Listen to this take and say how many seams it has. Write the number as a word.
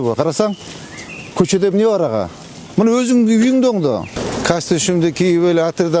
one